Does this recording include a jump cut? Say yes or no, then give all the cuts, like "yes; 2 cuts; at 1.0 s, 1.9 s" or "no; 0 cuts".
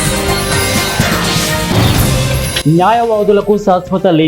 no; 0 cuts